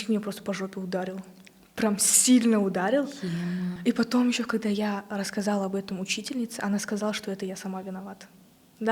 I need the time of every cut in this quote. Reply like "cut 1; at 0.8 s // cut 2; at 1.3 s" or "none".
cut 1; at 3.8 s